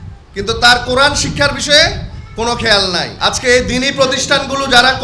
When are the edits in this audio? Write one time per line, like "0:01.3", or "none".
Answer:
0:03.1